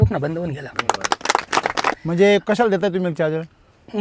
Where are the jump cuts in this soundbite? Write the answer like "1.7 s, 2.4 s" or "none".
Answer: 0.8 s, 2.0 s